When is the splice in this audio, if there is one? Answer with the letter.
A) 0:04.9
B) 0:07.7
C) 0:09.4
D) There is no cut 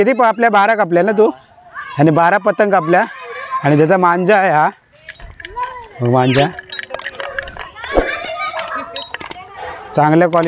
D